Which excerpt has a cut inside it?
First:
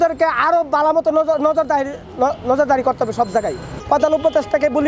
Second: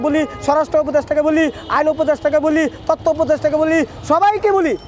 first; 1 cut; at 3.8 s

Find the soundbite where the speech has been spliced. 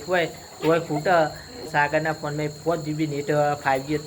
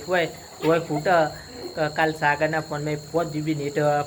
first; 1 cut; at 1.7 s

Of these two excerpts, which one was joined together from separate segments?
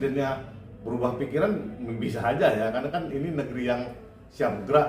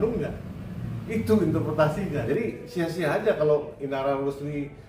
second; 1 cut; at 2.2 s

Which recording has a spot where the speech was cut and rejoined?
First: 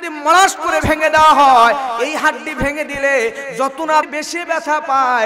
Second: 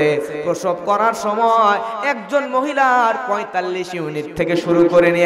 first; 1 cut; at 4.1 s

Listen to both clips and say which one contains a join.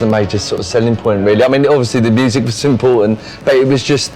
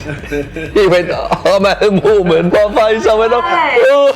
second; 1 cut; at 2.5 s

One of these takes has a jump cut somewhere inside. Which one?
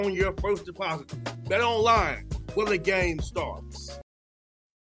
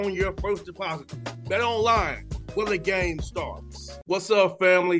first; 1 cut; at 4.0 s

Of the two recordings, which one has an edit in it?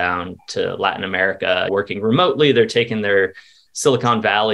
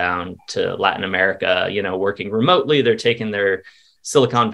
first; 1 cut; at 1.7 s

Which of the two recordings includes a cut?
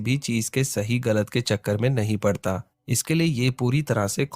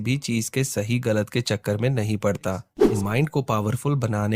second; 1 cut; at 2.7 s

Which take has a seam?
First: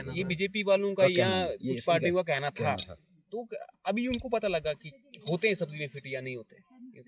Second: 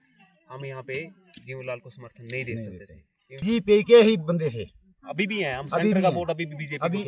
second; 1 cut; at 3.4 s

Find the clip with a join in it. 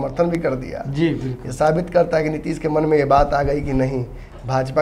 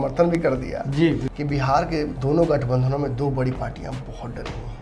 second; 1 cut; at 1.3 s

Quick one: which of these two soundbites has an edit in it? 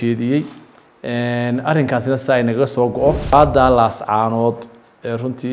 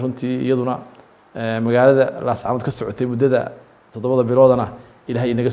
first; 1 cut; at 3.3 s

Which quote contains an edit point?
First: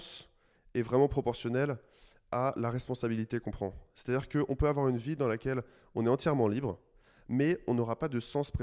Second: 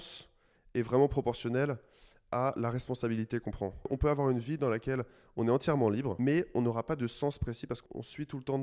second; 3 cuts; at 3.9 s, 6.1 s, 7.8 s

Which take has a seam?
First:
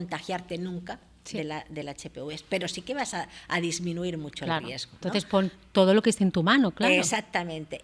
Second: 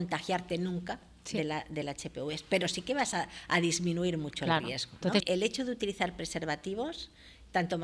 second; 1 cut; at 5.2 s

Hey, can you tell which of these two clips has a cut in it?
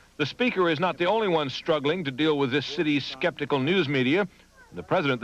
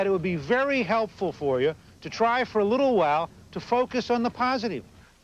second; 1 cut; at 3.2 s

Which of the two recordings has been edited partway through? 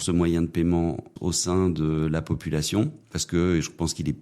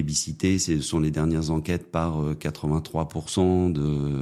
first; 2 cuts; at 1.1 s, 3.1 s

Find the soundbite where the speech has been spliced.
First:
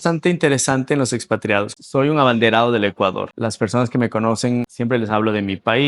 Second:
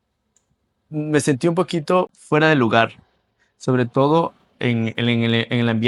first; 3 cuts; at 1.7 s, 3.3 s, 4.7 s

